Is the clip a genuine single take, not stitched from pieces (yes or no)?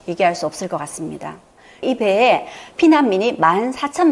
no